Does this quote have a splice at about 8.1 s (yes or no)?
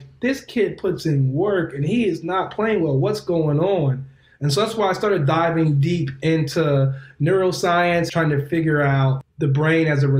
yes